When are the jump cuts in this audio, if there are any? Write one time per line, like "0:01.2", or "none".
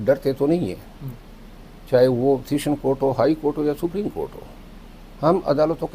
none